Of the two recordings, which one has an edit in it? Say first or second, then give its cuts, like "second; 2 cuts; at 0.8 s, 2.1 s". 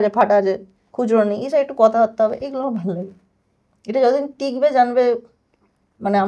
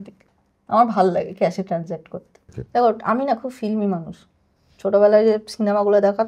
second; 1 cut; at 2.5 s